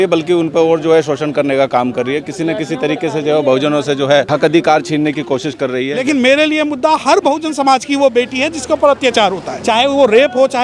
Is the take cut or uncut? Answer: cut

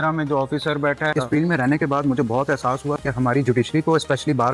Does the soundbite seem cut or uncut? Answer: cut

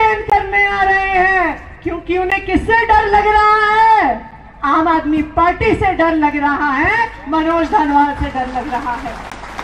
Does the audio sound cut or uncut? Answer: uncut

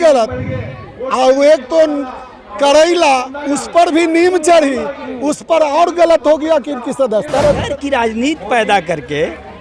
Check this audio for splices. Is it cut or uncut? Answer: cut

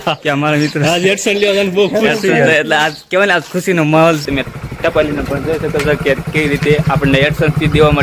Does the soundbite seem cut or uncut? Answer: cut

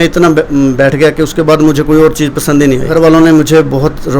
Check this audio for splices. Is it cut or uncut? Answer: cut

